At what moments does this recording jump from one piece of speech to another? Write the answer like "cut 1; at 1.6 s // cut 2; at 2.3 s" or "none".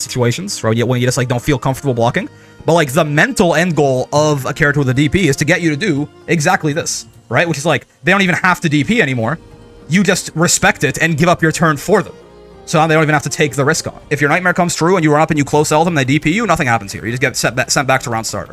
cut 1; at 14.1 s

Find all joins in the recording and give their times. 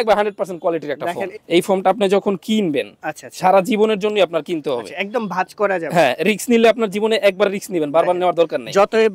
cut 1; at 1.3 s

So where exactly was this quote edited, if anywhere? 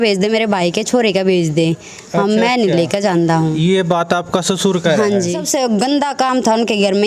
cut 1; at 5.4 s

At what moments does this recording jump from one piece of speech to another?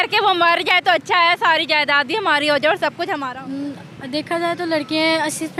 cut 1; at 3.2 s

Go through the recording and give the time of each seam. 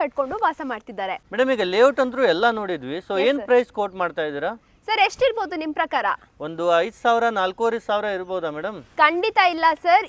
none

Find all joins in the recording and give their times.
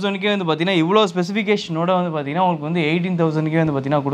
none

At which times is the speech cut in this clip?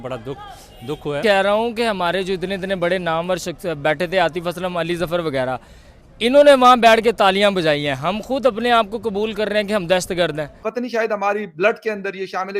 cut 1; at 1.2 s // cut 2; at 10.5 s

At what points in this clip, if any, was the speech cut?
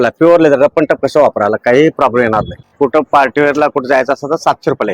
cut 1; at 2.7 s

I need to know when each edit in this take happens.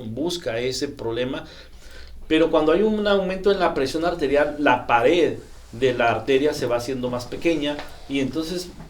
cut 1; at 1.6 s

